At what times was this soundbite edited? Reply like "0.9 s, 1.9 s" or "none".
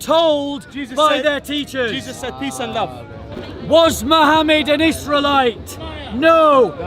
3.3 s